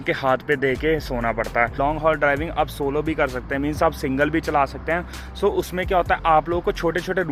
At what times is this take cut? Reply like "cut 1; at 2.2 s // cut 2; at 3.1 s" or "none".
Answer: cut 1; at 1.8 s